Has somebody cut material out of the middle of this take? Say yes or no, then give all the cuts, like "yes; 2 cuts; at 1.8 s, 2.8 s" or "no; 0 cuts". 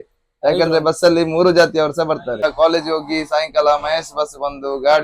yes; 1 cut; at 2.4 s